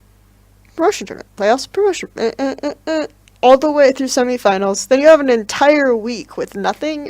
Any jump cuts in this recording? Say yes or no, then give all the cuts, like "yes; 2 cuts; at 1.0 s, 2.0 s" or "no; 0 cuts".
yes; 1 cut; at 3.0 s